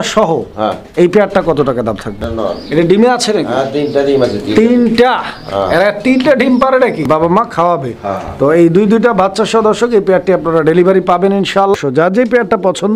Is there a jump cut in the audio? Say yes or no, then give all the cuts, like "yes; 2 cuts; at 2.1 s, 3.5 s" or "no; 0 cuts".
yes; 3 cuts; at 2.2 s, 7.1 s, 11.7 s